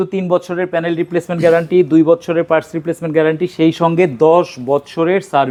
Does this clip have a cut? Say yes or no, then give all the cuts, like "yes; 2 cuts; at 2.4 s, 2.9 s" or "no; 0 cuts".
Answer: no; 0 cuts